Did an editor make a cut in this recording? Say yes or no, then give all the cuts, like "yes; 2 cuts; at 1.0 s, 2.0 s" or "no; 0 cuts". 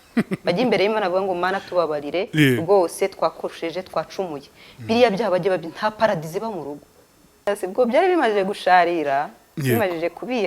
yes; 1 cut; at 7.5 s